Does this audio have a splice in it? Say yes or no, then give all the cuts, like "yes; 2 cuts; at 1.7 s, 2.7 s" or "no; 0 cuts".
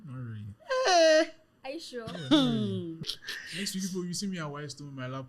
yes; 1 cut; at 3.0 s